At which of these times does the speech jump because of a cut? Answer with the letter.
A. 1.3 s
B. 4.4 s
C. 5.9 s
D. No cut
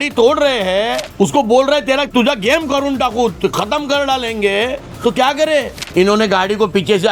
C